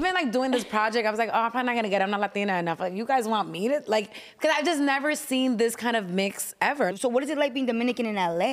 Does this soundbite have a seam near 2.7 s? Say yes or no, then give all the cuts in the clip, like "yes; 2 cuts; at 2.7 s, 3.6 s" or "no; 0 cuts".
no; 1 cut; at 6.9 s